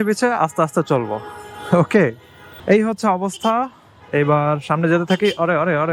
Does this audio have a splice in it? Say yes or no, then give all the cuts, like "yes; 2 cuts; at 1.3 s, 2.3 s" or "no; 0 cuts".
yes; 1 cut; at 2.5 s